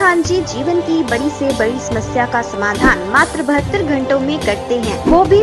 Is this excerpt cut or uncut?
uncut